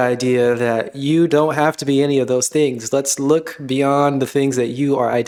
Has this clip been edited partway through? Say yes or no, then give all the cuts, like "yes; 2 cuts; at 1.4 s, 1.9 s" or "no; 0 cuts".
no; 0 cuts